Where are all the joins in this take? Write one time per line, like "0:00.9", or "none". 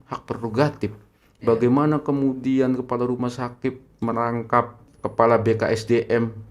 0:04.8

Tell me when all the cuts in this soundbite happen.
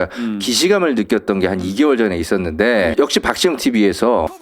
0:02.9

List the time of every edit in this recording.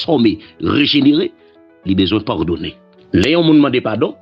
0:02.9

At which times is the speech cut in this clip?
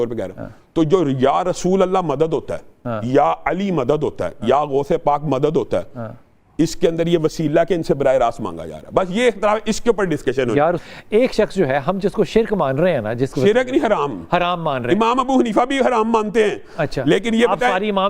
0:10.8

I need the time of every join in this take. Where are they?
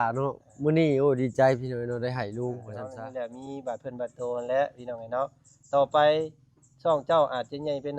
0:02.9

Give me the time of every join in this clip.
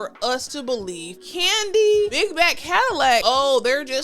0:01.1
0:02.1
0:03.2

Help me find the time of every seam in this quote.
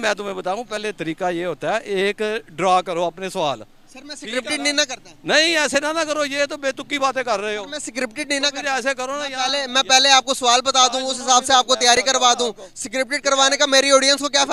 none

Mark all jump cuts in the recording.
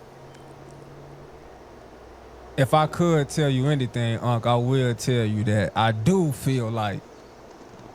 0:04.2

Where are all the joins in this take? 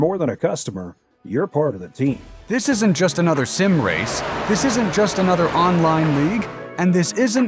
0:02.5

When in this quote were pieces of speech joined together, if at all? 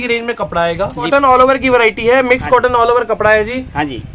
0:01.1

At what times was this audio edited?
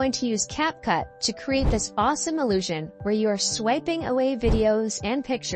none

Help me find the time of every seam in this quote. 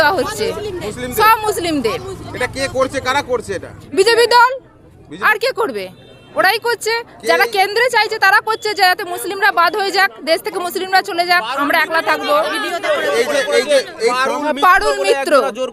none

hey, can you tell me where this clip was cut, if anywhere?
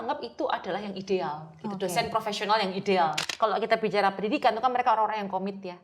0:03.2

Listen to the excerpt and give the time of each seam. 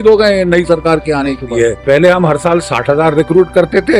0:01.5

